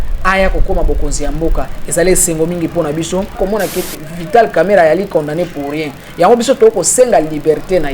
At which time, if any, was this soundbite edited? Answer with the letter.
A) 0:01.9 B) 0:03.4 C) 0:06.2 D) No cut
B